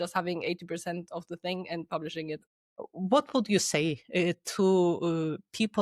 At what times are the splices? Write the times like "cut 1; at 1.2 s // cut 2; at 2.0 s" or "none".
cut 1; at 2.4 s